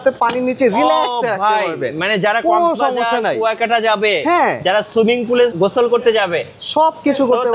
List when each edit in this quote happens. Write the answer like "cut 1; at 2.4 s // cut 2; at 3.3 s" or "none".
cut 1; at 5.5 s